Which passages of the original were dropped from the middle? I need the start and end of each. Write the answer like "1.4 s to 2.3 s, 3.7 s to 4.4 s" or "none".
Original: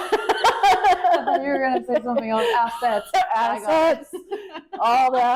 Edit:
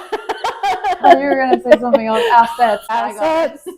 1.0 s to 1.2 s, 3.1 s to 3.3 s